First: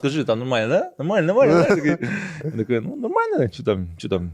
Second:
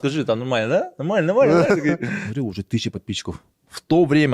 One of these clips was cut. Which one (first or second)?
second